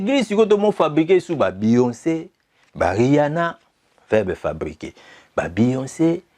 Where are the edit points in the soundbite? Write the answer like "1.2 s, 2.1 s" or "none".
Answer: none